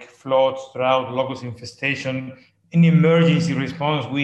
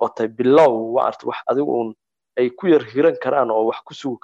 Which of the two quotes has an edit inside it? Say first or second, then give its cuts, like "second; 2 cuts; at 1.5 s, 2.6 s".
first; 1 cut; at 2.5 s